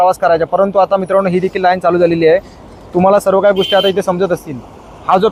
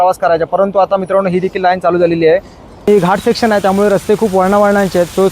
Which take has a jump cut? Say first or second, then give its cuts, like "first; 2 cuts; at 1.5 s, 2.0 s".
second; 1 cut; at 2.9 s